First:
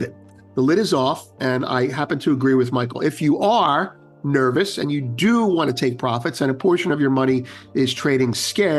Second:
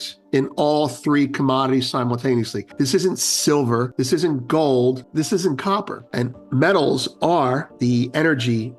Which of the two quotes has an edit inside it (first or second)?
second